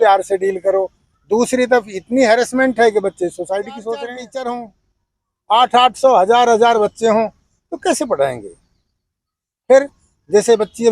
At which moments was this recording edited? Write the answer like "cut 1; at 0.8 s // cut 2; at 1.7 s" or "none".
cut 1; at 4.0 s